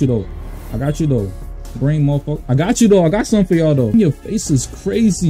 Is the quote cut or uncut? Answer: cut